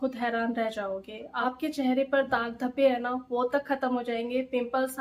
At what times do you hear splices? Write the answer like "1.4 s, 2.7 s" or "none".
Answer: none